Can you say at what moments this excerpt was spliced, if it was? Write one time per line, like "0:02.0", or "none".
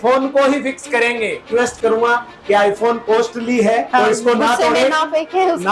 0:01.5
0:03.9